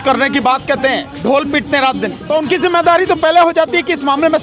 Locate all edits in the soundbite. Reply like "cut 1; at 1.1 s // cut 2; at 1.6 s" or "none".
cut 1; at 2.2 s

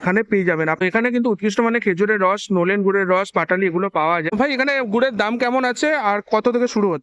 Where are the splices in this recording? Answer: cut 1; at 0.8 s // cut 2; at 4.3 s

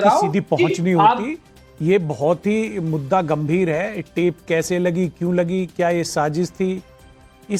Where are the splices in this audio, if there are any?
none

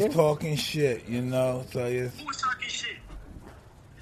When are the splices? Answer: cut 1; at 3.0 s

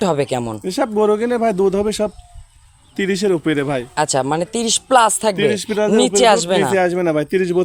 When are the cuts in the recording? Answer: none

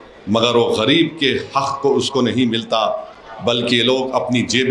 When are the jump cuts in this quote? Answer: none

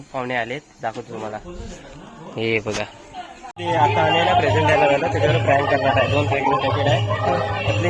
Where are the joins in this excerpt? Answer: cut 1; at 3.5 s

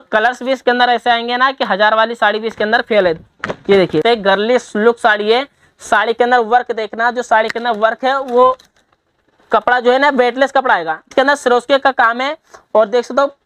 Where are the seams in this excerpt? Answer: cut 1; at 4.0 s // cut 2; at 11.1 s

